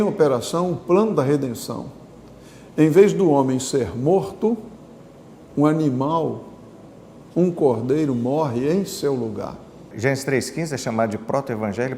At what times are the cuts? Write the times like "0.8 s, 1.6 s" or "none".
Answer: 9.9 s